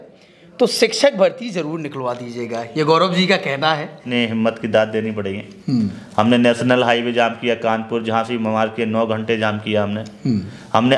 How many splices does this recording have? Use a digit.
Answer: 1